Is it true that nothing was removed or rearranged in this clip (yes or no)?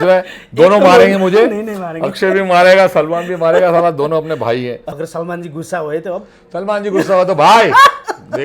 no